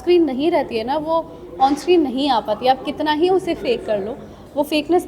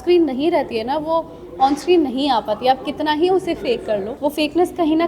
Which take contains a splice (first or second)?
second